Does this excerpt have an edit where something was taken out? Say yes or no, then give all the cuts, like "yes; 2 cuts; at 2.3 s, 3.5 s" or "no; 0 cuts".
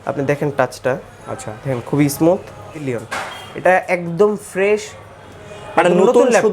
yes; 1 cut; at 2.9 s